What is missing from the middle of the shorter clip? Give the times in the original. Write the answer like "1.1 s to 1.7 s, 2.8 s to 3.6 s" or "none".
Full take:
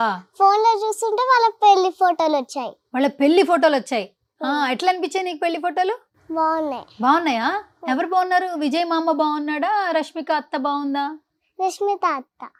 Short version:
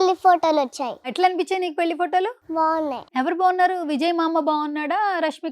2.8 s to 4.7 s, 6.3 s to 7.4 s

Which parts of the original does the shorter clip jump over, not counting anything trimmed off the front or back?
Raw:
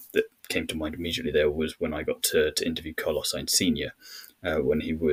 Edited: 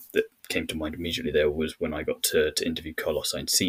none

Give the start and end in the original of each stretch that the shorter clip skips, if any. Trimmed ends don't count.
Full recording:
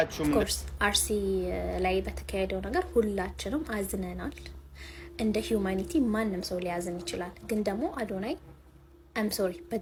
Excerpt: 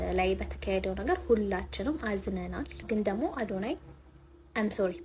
4.4 s to 7.4 s

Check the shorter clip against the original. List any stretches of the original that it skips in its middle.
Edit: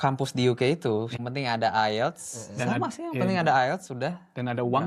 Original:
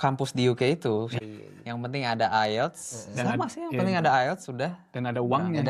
1.2 s to 1.8 s

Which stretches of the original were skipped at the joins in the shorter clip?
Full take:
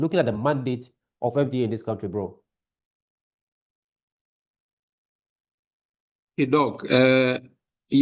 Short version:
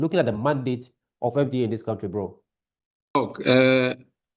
3.2 s to 6.6 s

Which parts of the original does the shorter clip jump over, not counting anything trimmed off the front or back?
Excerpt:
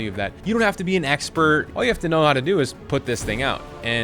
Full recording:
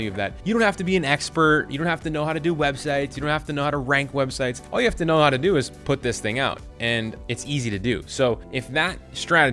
1.7 s to 4.6 s

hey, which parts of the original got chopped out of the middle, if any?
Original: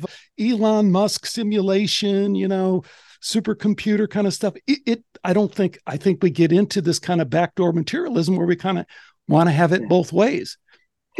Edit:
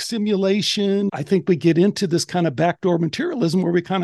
2.4 s to 5.8 s

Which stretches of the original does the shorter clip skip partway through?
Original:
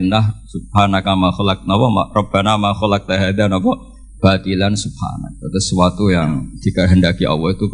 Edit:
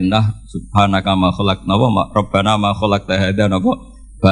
none

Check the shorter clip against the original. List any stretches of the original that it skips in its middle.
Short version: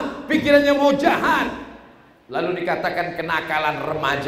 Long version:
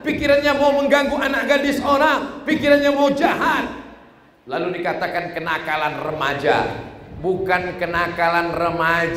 none

